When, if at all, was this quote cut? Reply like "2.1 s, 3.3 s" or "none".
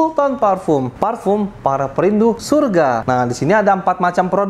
0.9 s, 2.6 s

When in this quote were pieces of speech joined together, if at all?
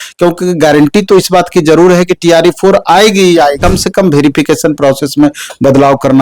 3.6 s

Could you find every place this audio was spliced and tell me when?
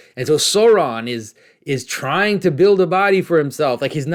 none

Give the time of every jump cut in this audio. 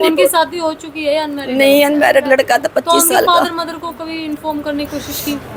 none

